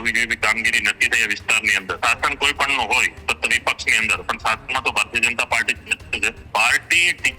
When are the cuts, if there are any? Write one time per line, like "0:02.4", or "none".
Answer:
0:02.0
0:06.4